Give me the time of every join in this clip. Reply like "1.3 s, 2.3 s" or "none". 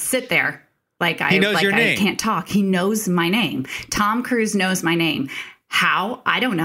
none